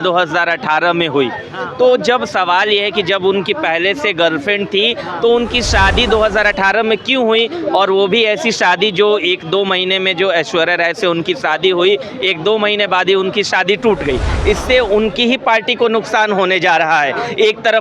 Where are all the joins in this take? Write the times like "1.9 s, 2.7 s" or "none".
14.3 s

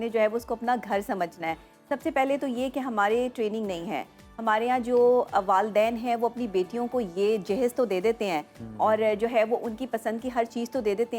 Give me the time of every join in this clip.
none

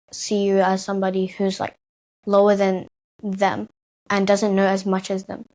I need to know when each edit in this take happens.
none

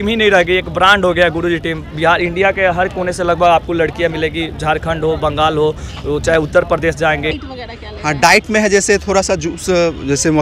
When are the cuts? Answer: 7.4 s

